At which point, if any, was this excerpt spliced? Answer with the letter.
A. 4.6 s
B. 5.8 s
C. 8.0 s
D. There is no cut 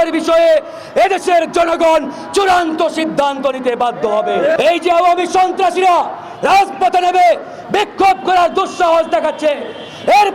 A